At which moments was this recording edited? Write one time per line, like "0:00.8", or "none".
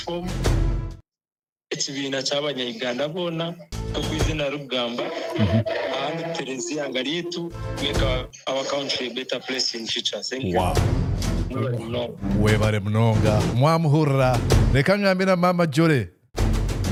none